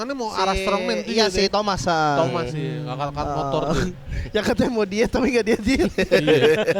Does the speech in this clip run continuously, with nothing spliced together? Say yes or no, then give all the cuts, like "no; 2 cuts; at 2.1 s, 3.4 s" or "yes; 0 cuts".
yes; 0 cuts